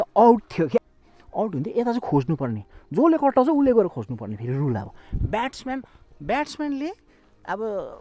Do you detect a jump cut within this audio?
yes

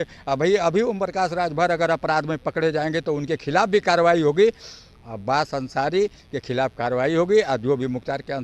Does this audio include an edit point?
no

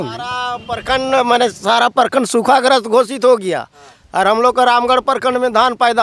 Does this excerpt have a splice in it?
no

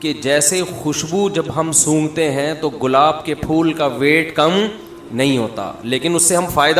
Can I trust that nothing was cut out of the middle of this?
yes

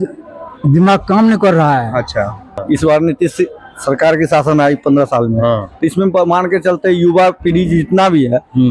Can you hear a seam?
yes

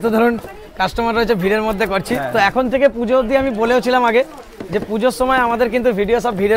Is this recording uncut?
yes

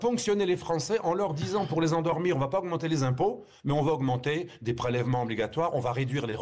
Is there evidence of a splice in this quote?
no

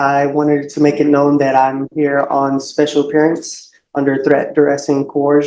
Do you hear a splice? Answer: no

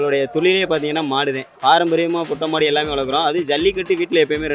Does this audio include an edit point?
no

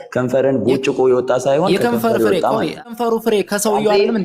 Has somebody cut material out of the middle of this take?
yes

